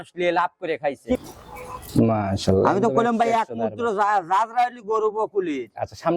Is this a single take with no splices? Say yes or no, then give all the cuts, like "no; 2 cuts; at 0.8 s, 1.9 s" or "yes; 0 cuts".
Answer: no; 1 cut; at 1.1 s